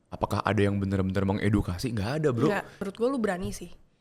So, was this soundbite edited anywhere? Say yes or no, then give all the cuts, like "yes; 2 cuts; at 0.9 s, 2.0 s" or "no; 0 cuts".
yes; 1 cut; at 2.9 s